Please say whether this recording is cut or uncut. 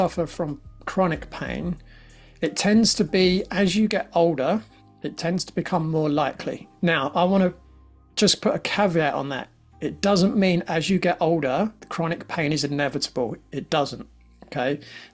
cut